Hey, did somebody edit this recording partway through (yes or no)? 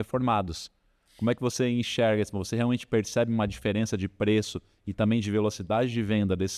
no